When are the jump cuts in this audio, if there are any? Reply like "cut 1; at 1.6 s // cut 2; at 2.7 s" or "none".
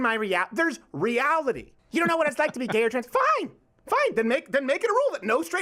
cut 1; at 1.7 s